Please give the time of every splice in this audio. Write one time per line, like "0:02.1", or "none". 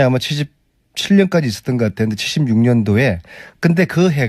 0:02.2